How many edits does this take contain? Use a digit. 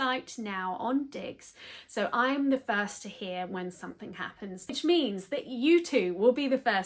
1